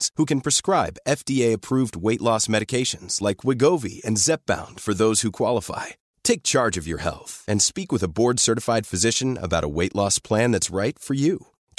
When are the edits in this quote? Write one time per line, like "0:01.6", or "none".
none